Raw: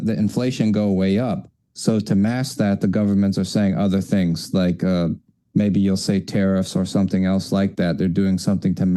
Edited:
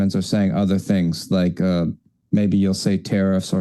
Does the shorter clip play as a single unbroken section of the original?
yes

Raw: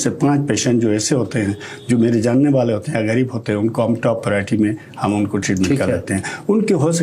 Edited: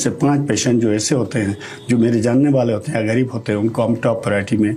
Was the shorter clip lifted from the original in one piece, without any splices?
yes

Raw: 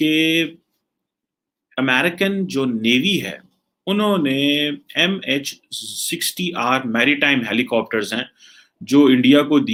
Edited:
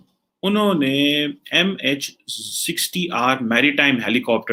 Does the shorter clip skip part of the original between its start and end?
no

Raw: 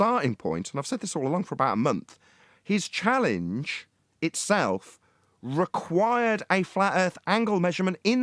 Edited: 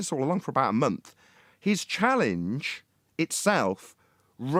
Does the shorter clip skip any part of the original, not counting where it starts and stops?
no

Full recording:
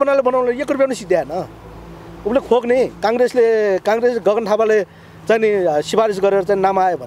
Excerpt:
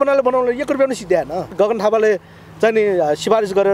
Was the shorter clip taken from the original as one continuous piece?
no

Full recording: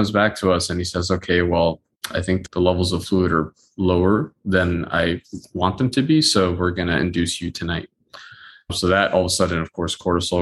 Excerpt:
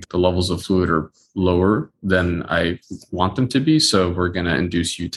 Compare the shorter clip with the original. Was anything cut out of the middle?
no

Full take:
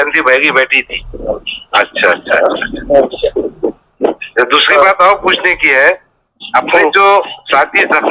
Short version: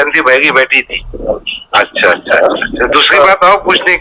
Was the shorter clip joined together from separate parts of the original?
yes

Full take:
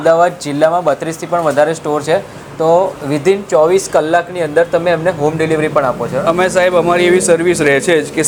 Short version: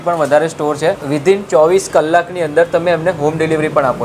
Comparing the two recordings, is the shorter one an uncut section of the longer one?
no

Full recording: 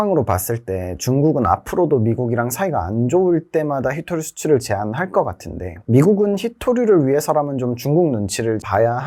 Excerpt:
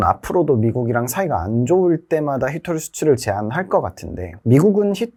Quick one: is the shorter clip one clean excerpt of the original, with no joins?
yes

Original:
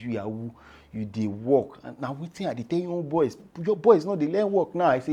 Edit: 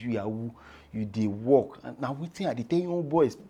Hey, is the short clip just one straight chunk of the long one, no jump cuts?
yes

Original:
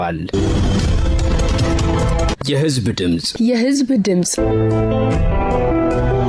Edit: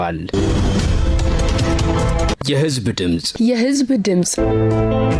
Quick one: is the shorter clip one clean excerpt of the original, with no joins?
yes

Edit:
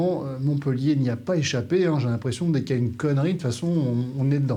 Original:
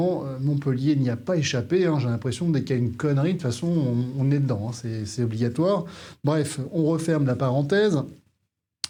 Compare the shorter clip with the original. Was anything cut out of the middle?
no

